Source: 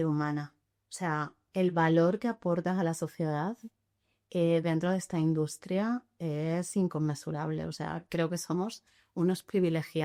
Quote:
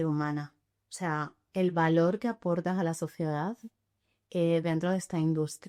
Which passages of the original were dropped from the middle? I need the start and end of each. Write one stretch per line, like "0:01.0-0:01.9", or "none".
none